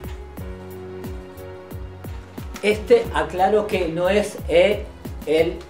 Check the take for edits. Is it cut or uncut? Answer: uncut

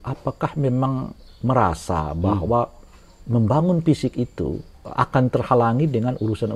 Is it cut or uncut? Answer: cut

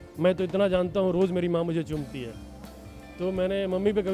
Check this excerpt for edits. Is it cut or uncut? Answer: uncut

